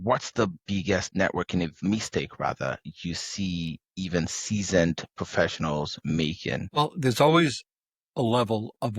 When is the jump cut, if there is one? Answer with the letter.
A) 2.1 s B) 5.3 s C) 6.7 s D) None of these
C